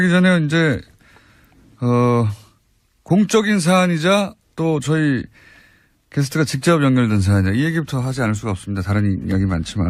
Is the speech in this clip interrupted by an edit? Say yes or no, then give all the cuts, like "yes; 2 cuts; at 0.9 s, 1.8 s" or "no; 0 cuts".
no; 0 cuts